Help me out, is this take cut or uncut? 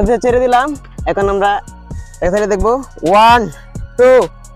uncut